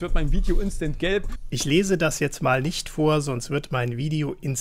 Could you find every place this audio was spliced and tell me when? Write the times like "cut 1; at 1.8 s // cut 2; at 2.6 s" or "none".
cut 1; at 1.3 s